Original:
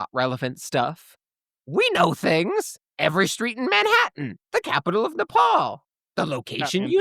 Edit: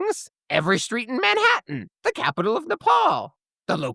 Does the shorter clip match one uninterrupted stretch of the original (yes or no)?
yes